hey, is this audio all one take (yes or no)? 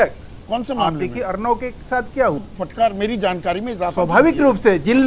no